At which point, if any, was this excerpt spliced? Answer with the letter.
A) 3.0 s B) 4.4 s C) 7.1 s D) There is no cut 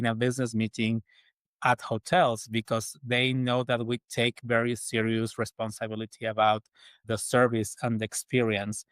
C